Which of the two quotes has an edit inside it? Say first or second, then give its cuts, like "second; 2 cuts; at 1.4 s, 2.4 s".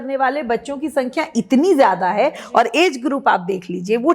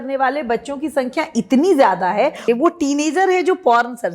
second; 1 cut; at 2.4 s